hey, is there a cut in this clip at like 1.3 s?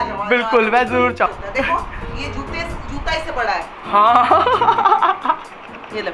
yes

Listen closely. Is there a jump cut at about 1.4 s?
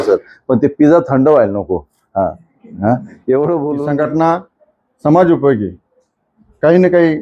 no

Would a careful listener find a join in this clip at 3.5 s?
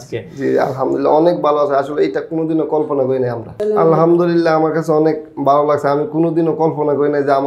yes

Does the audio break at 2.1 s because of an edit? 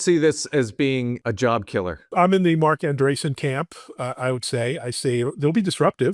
yes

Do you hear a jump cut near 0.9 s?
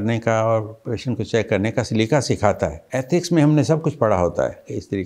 no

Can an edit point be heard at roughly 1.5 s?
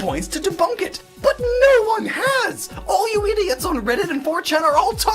no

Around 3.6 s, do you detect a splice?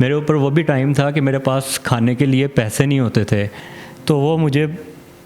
yes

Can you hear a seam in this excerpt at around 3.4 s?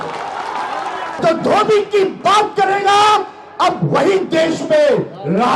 no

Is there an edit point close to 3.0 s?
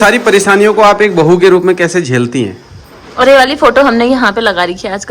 yes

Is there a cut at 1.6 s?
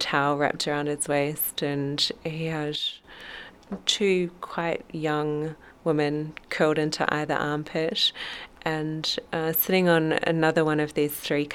no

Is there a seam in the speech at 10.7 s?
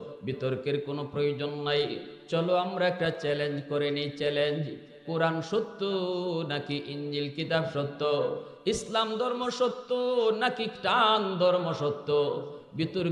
yes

